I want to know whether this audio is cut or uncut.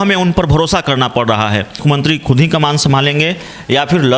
cut